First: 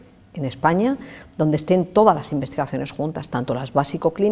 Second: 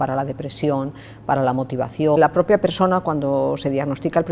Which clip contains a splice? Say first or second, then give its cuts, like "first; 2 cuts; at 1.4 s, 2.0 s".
second; 1 cut; at 2.2 s